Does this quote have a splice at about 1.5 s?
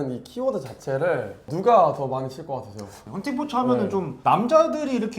yes; 3 cuts; at 1.5 s, 2.9 s, 4.1 s

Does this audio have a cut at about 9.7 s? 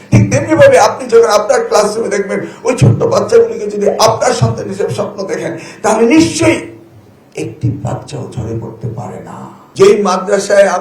yes; 1 cut; at 9.7 s

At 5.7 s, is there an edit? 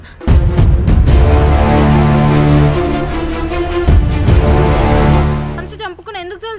yes; 1 cut; at 5.7 s

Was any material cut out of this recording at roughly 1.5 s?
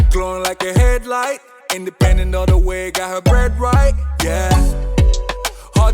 yes; 1 cut; at 1.5 s

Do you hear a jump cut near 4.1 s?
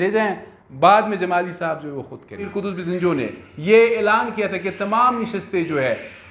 no; 1 cut; at 2.5 s

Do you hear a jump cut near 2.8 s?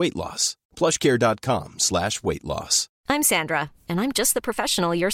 yes; 1 cut; at 2.8 s

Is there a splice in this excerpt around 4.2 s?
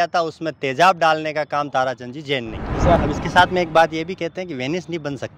no; 1 cut; at 3.0 s

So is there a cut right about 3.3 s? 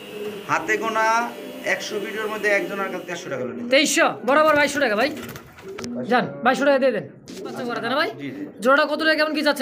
yes; 2 cuts; at 3.3 s, 7.8 s

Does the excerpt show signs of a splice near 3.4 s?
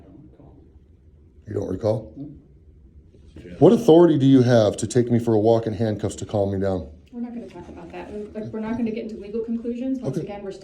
yes; 1 cut; at 3.4 s

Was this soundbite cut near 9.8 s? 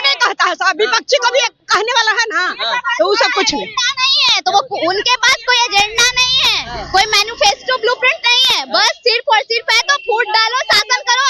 no; 0 cuts

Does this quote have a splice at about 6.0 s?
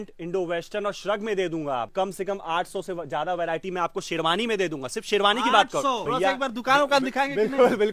yes; 2 cuts; at 1.9 s, 6.0 s

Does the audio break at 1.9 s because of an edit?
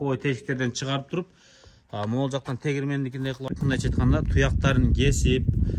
no; 1 cut; at 3.5 s

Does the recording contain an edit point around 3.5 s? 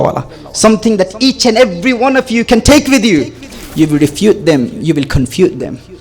yes; 1 cut; at 3.5 s

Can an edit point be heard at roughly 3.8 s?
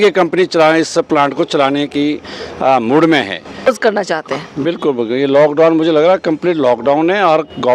yes; 1 cut; at 3.8 s

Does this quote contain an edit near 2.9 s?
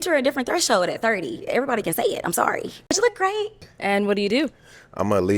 yes; 2 cuts; at 2.9 s, 3.7 s

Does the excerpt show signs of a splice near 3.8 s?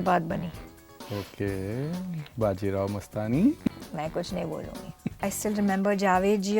yes; 2 cuts; at 3.8 s, 5.3 s

